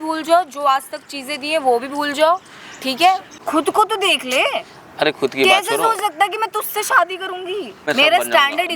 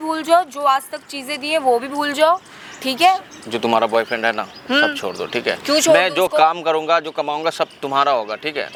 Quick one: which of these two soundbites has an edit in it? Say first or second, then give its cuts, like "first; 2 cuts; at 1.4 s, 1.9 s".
first; 2 cuts; at 3.3 s, 7.8 s